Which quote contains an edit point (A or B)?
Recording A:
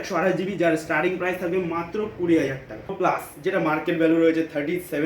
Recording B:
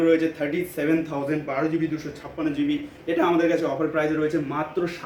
A